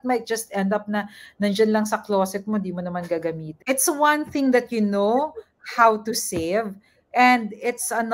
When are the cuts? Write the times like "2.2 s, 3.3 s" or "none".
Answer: 3.5 s